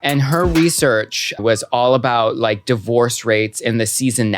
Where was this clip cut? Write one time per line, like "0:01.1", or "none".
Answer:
0:01.4